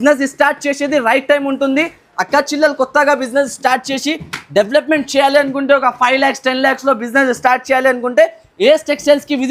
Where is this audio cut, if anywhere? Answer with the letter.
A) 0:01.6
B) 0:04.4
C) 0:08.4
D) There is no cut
D